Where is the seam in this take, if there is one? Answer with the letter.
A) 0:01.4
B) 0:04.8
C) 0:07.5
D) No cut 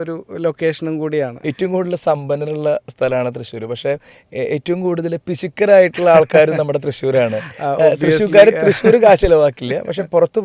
A